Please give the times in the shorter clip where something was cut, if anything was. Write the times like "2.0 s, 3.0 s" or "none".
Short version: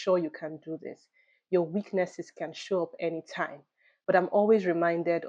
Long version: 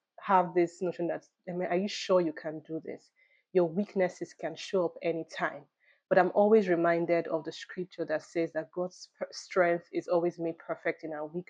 none